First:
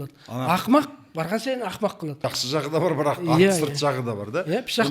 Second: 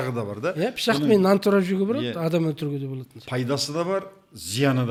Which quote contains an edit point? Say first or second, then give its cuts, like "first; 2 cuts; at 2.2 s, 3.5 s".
first; 1 cut; at 2.1 s